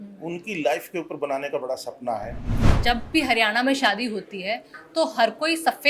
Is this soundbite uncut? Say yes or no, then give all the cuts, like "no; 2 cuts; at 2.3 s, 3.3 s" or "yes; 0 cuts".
no; 1 cut; at 2.6 s